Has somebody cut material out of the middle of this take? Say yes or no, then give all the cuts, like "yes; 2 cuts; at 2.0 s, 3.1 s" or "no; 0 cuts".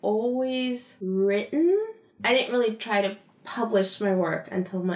yes; 1 cut; at 0.9 s